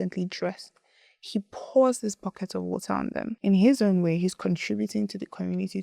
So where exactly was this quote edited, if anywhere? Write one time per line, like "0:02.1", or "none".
0:03.4

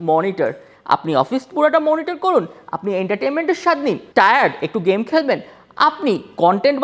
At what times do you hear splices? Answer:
0:04.0

